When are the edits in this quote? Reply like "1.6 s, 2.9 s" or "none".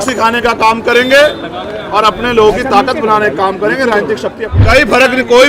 4.5 s